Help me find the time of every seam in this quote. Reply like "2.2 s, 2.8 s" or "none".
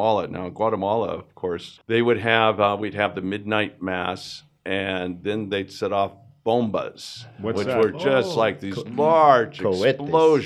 1.7 s